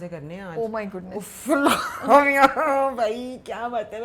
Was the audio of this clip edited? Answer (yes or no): no